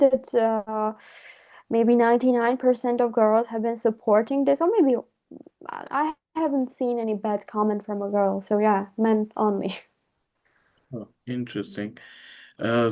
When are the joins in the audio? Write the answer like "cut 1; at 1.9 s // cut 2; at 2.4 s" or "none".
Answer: none